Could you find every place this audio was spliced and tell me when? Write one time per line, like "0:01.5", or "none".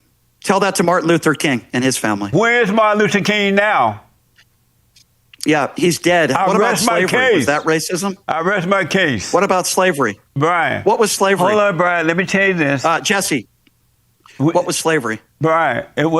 0:02.5

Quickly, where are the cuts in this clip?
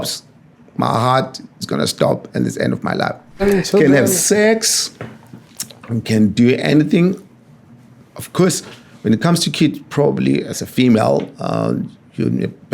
0:03.4

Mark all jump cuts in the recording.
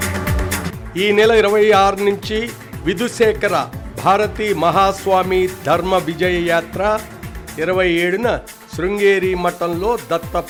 none

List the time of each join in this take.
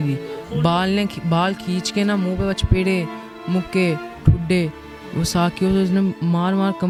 none

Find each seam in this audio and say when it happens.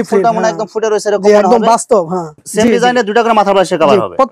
none

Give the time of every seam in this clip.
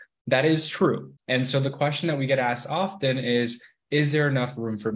0:01.1

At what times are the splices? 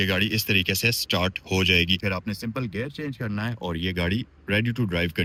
none

